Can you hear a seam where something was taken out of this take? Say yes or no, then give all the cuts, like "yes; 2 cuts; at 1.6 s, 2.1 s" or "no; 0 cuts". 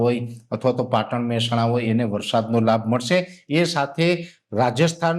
no; 0 cuts